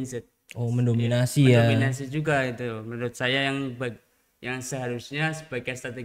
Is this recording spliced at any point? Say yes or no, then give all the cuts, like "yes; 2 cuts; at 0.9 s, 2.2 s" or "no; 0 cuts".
no; 0 cuts